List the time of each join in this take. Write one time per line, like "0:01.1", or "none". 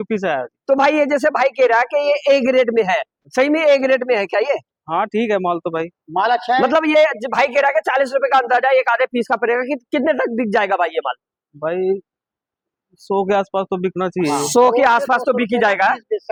none